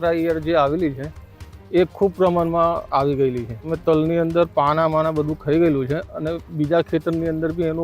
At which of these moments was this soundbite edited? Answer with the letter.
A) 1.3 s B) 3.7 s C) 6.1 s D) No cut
B